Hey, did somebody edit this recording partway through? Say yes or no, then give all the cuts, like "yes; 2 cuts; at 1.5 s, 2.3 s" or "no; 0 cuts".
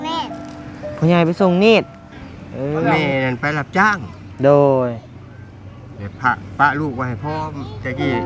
yes; 1 cut; at 3.0 s